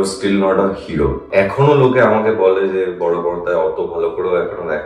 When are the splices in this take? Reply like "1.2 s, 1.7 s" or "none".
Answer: 1.2 s